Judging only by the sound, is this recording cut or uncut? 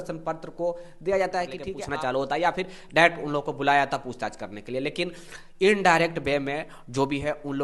cut